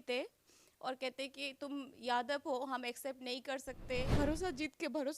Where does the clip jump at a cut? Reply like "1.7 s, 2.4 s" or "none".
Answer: 4.1 s